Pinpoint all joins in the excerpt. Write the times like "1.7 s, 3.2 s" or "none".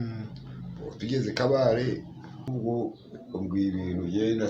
2.5 s